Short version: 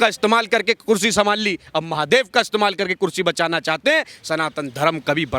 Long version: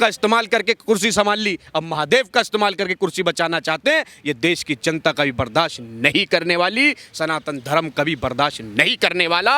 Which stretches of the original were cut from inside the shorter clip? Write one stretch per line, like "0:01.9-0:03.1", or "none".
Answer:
0:04.1-0:07.0